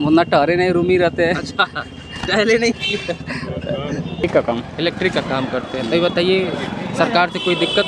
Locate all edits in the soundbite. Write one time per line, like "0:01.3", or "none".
0:04.2